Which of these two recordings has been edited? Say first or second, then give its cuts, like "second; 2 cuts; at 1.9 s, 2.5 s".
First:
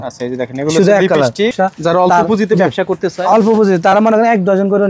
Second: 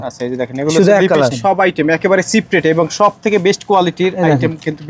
first; 1 cut; at 1.4 s